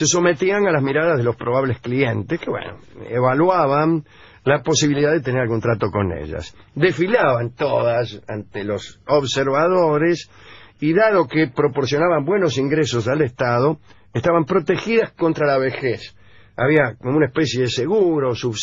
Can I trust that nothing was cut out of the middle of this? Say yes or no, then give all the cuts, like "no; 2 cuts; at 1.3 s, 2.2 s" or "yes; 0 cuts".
no; 1 cut; at 3.7 s